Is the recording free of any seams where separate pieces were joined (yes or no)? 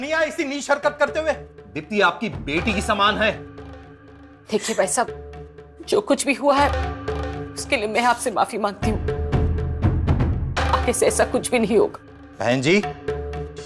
yes